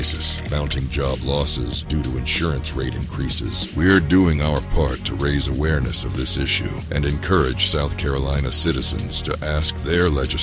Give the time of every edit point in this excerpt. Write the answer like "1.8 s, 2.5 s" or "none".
none